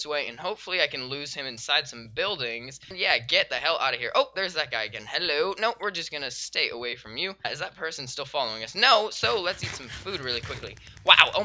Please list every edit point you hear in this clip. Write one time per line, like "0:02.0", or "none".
0:02.9
0:07.4